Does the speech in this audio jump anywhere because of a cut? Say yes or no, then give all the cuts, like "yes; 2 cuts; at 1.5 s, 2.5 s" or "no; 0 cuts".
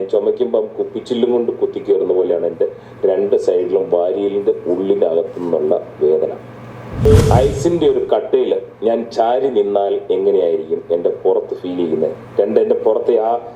yes; 1 cut; at 7.0 s